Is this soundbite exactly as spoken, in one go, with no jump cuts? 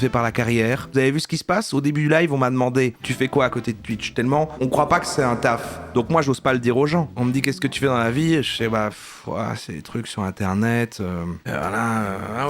no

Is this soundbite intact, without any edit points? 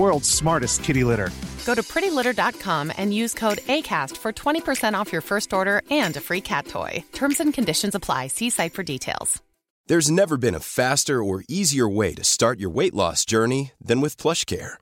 no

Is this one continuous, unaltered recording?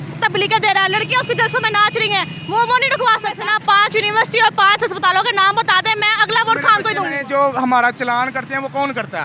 no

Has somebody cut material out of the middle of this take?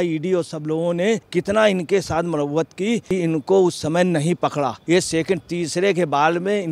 yes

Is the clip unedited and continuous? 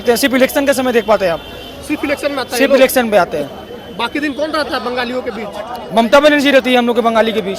yes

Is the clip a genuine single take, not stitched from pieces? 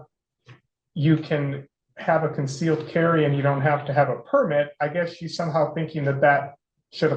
yes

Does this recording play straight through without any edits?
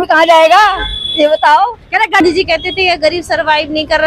no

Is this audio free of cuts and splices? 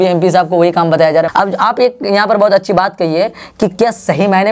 no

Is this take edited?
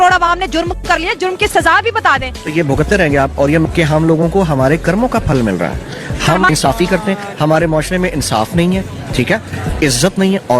no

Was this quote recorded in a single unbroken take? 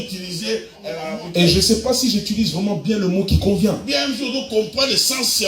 no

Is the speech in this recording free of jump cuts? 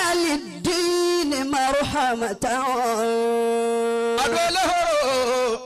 yes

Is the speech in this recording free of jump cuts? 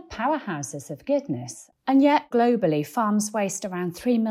no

